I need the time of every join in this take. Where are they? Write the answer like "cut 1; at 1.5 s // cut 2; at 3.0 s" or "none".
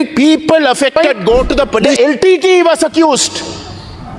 cut 1; at 1.9 s